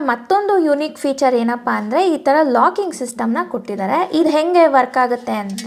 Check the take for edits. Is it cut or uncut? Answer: uncut